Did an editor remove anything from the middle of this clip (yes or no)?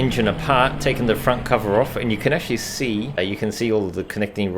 yes